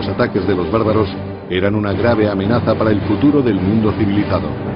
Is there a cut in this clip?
yes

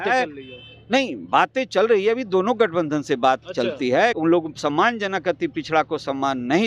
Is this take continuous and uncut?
no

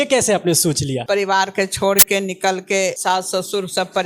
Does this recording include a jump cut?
yes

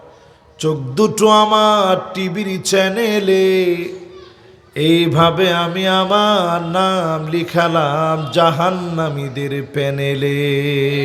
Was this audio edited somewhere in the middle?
no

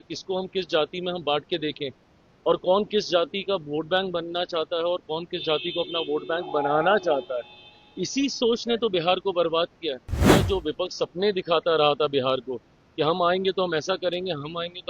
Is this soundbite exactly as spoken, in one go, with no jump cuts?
no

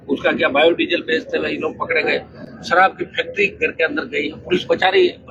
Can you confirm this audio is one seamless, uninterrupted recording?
yes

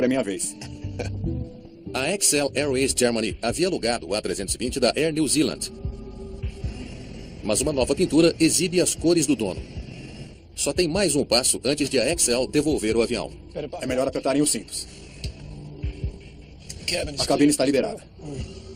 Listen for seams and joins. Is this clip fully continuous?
no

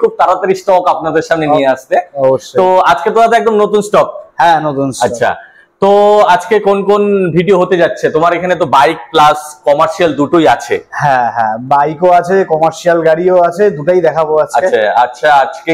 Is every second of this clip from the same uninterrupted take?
yes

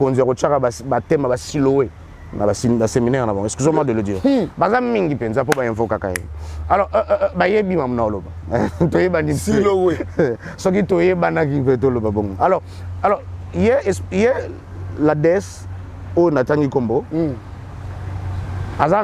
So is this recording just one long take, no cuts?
yes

